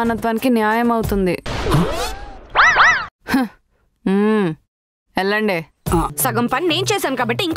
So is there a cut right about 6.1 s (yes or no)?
yes